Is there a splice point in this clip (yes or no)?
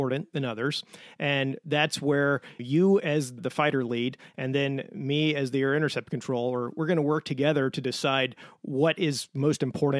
yes